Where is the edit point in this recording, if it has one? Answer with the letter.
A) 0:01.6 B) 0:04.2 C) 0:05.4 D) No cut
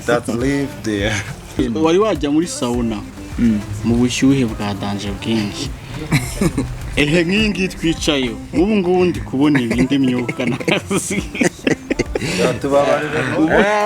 A